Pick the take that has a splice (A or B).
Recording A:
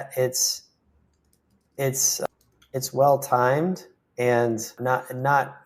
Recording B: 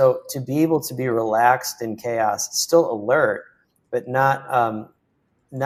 A